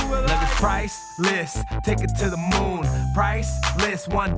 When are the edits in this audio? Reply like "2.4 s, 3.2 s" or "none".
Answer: none

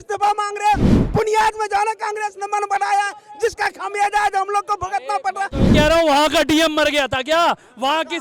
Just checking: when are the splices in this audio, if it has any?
5.6 s

